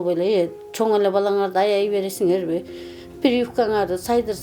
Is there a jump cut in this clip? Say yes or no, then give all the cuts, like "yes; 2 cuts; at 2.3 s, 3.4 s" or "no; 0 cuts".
no; 0 cuts